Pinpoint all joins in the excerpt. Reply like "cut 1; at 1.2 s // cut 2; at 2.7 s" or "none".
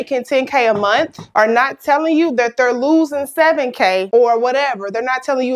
cut 1; at 1.2 s